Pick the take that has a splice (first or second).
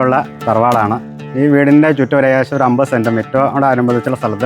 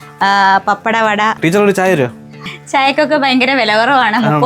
second